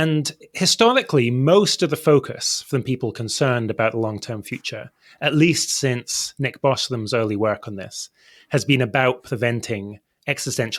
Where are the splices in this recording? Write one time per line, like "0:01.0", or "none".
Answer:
none